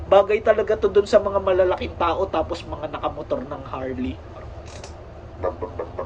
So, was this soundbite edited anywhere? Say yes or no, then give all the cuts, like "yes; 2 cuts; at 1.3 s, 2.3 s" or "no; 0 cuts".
no; 0 cuts